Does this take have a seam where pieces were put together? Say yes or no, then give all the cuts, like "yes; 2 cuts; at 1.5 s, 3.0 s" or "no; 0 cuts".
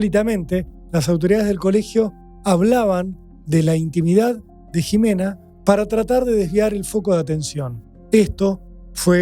no; 0 cuts